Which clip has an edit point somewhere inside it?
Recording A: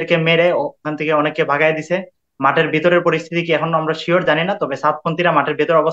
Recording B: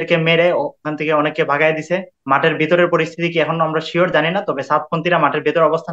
B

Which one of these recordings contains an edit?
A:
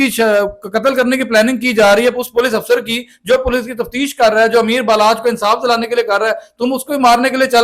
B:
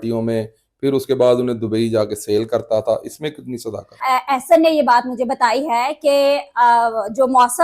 B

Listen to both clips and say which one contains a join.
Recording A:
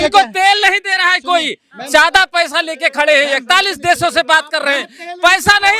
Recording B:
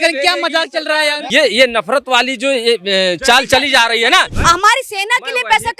B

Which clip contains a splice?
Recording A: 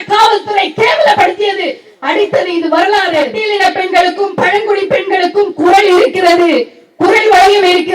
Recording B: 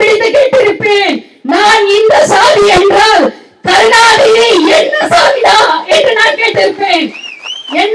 A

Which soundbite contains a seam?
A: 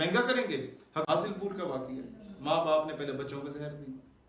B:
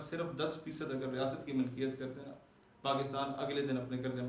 A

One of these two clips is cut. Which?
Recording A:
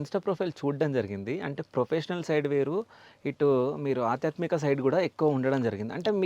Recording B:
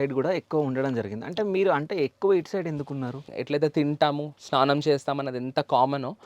B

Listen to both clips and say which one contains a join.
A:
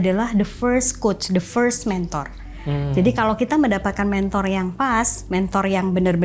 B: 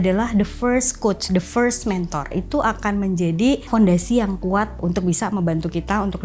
B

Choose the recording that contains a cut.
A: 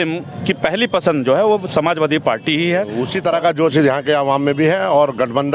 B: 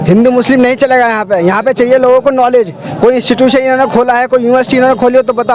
A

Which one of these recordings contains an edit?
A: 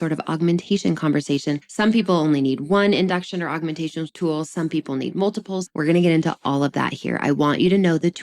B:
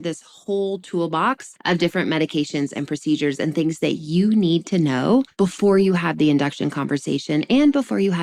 A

